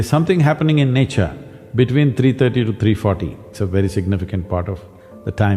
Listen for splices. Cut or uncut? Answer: cut